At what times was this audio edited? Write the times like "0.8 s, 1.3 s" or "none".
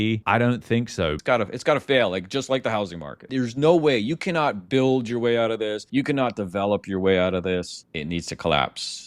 1.2 s